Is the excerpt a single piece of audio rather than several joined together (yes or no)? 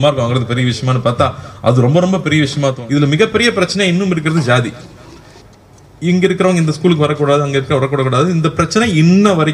no